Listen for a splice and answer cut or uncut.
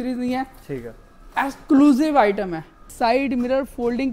cut